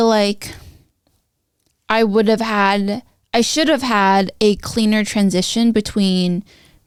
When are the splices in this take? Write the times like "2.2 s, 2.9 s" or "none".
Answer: none